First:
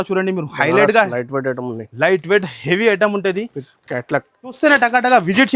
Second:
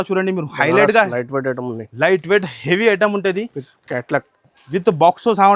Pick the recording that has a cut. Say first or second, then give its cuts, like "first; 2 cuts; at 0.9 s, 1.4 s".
first; 1 cut; at 4.6 s